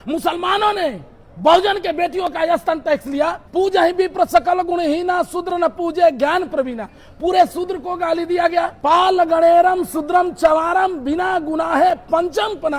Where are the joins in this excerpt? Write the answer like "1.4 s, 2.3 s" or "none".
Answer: 3.4 s, 8.7 s